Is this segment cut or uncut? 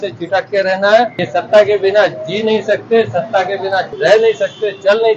cut